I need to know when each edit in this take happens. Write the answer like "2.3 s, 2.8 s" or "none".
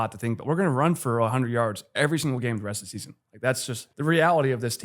3.8 s